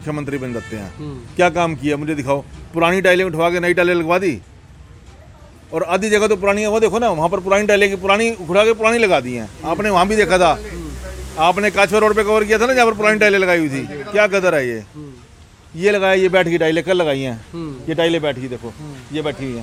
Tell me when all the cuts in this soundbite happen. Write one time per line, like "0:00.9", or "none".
none